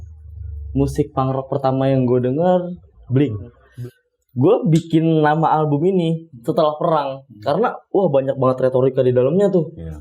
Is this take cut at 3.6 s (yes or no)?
yes